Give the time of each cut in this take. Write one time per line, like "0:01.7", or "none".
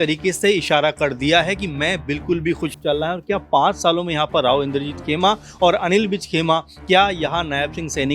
0:02.8